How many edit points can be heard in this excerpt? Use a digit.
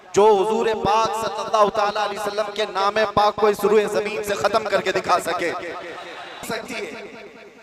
1